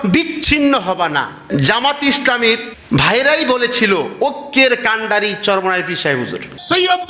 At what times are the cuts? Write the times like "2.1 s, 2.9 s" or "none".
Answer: 1.4 s